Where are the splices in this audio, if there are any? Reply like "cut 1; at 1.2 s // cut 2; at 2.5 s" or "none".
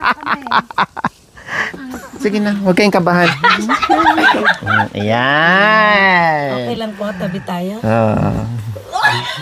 cut 1; at 1.6 s